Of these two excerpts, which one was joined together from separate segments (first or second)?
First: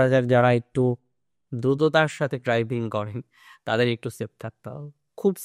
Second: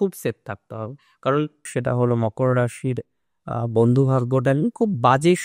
second